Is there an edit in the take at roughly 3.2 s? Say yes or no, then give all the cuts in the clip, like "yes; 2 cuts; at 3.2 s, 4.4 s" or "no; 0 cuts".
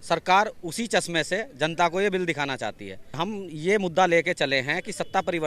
yes; 1 cut; at 3.2 s